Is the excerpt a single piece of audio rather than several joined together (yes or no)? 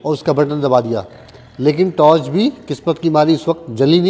yes